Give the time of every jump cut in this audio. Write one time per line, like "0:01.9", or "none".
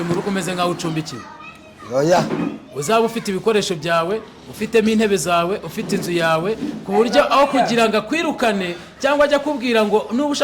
none